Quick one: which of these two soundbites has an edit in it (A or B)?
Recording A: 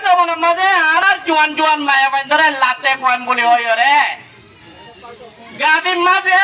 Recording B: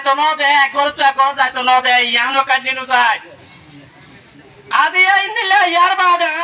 A